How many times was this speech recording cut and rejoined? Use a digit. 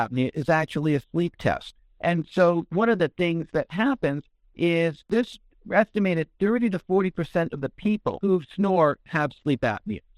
3